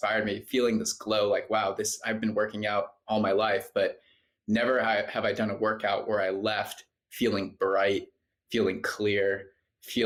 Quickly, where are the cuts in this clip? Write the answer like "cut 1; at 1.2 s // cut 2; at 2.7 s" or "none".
none